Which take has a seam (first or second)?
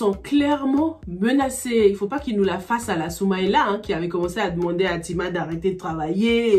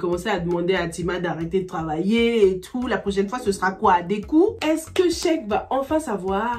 second